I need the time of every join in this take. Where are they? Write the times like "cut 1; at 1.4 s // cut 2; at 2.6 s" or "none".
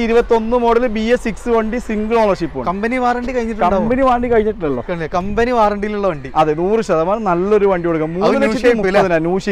none